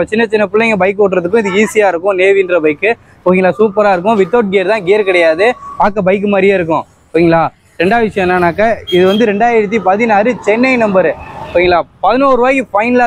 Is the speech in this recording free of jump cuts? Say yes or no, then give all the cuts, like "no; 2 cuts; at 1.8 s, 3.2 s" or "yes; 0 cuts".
yes; 0 cuts